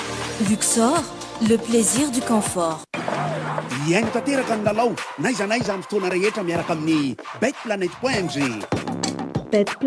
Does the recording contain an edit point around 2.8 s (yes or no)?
no